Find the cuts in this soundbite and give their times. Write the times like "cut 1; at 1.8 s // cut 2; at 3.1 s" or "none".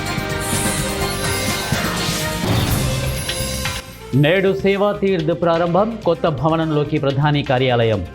cut 1; at 3.8 s